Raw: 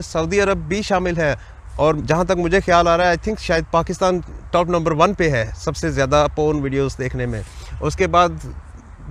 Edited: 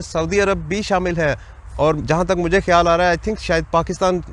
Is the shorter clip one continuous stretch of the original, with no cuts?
yes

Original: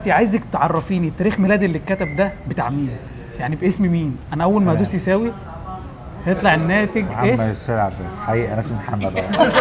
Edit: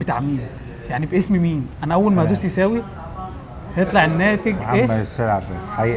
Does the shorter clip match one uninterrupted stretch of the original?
yes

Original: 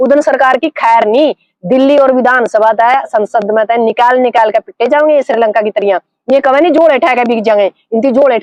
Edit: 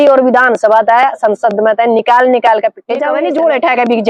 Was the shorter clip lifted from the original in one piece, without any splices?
no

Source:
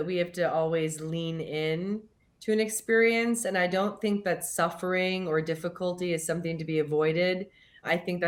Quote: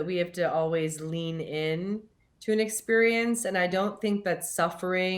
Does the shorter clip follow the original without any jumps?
yes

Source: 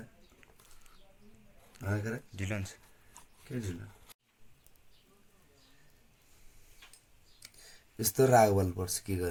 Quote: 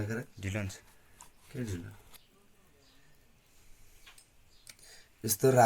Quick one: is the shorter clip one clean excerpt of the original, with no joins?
no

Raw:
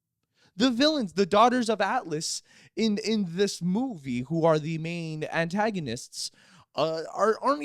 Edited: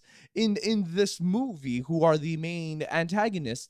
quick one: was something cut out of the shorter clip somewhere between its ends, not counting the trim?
no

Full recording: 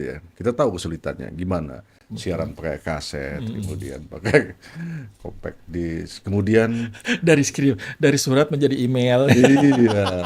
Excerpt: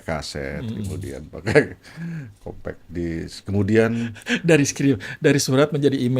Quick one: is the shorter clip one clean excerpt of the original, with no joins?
yes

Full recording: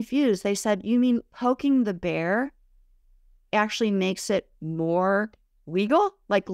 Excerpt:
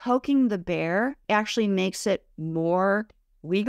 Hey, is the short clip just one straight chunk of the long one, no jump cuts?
no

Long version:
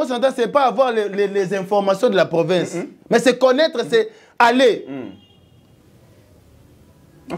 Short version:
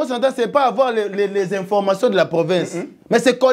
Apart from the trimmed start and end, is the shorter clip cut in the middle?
no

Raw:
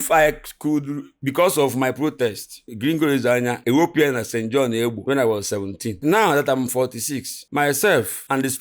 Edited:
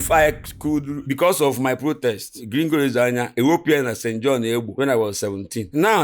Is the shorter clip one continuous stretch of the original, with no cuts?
no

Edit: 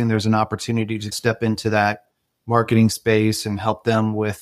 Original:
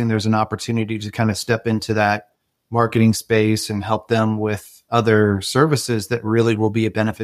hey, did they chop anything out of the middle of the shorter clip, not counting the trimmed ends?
yes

